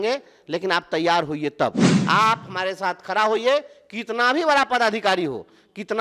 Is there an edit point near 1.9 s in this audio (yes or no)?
yes